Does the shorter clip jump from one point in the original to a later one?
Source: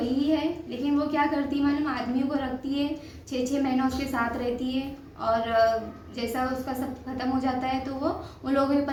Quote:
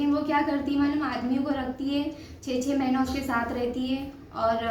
no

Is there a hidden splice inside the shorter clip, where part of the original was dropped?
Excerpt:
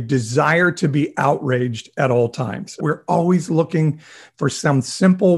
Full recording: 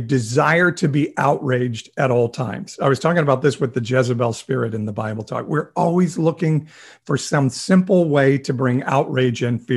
yes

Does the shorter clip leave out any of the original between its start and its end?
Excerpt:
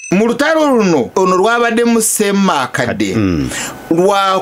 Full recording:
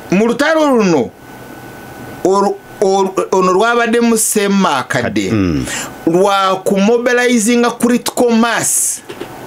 yes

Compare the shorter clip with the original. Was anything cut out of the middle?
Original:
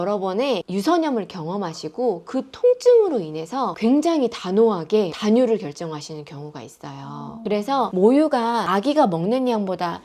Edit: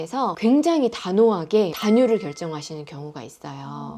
no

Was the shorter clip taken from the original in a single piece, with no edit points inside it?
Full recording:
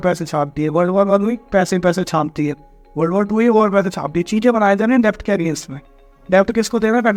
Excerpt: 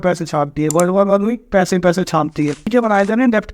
no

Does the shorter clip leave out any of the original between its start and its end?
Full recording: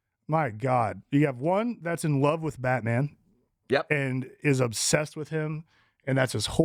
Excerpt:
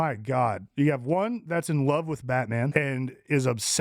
yes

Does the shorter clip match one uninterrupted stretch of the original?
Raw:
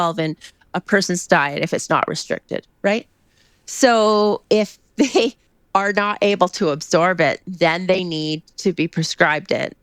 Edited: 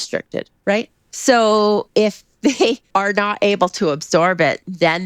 no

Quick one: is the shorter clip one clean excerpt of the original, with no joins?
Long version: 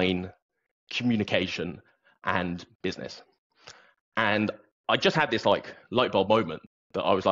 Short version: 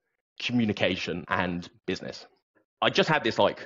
no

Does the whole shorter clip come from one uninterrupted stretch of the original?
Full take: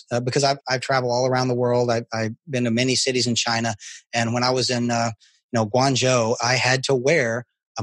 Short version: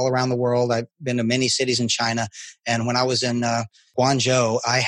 no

